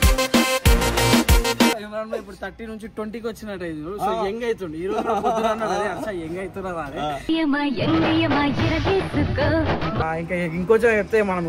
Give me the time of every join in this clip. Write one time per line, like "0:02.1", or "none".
0:01.7
0:10.0